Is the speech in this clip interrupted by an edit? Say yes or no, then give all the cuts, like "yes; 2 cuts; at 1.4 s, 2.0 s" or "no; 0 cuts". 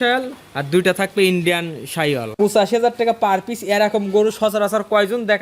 yes; 1 cut; at 2.4 s